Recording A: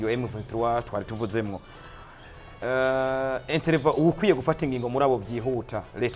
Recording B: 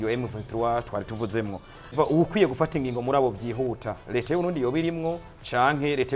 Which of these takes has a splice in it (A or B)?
B